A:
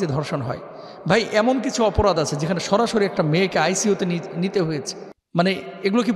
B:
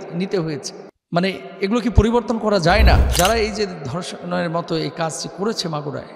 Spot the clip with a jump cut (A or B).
B